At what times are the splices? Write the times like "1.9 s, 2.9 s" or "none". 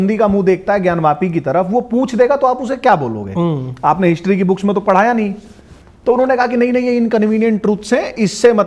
none